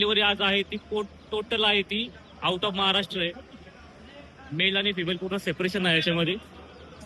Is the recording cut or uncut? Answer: uncut